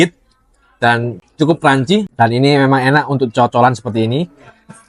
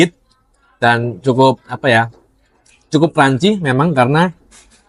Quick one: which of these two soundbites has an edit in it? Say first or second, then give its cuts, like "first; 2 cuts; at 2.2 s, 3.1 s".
first; 2 cuts; at 1.1 s, 2.1 s